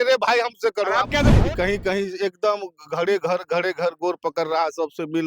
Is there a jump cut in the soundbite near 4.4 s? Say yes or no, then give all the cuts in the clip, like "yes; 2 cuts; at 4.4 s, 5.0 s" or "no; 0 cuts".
no; 1 cut; at 1.3 s